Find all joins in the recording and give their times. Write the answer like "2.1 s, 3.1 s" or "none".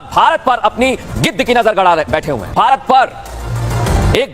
2.5 s